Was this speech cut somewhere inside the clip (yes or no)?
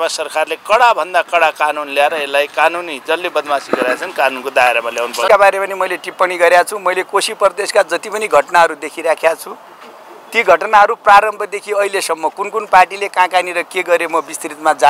yes